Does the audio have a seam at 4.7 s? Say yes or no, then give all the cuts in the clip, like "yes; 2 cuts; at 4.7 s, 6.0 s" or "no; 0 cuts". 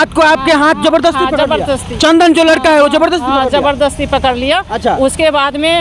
no; 0 cuts